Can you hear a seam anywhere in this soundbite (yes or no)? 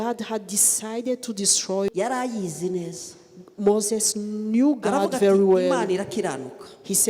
yes